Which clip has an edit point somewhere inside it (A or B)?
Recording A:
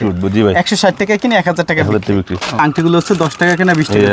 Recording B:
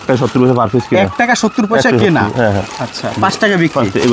A